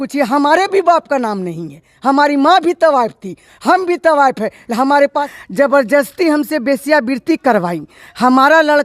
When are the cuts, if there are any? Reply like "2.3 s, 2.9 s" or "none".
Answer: 5.2 s